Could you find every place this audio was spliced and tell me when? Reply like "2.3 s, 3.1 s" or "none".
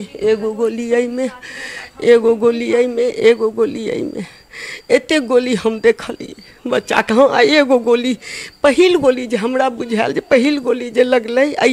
none